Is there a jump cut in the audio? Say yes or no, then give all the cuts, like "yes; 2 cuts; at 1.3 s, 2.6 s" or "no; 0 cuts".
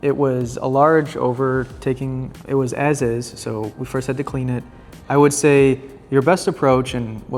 no; 0 cuts